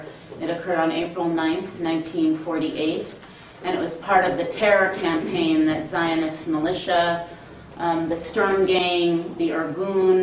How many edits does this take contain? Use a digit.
0